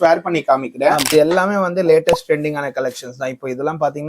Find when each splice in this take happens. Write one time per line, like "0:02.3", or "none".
0:01.1